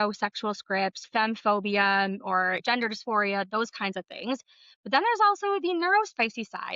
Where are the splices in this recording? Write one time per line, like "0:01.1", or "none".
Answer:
0:01.0
0:02.6